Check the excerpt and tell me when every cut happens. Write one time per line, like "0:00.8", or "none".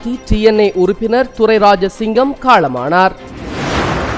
none